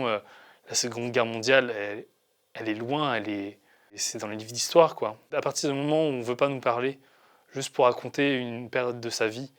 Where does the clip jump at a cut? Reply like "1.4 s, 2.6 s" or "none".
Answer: 4.0 s, 5.2 s